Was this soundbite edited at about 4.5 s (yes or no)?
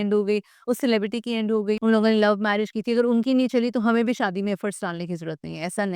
no